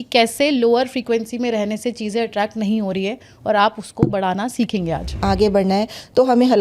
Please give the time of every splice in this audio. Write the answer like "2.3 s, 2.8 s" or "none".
5.2 s